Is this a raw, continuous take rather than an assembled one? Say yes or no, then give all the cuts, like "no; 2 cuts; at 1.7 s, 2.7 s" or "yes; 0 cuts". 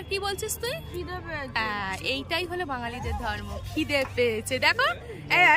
yes; 0 cuts